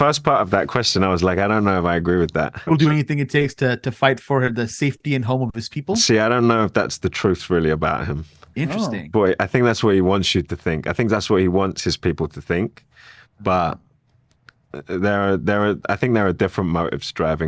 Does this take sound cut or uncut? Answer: cut